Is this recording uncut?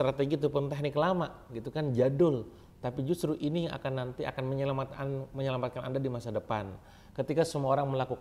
yes; 0 cuts

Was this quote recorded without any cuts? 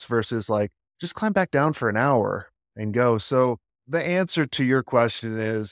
yes; 0 cuts

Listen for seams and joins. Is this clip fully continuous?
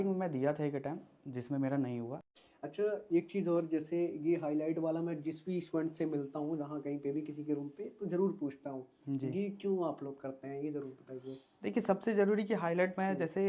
no; 1 cut; at 2.2 s

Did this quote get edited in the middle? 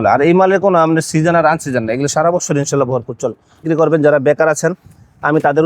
yes; 1 cut; at 3.6 s

